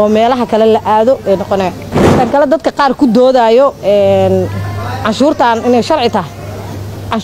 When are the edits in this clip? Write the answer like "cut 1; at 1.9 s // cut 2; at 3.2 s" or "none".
cut 1; at 1.7 s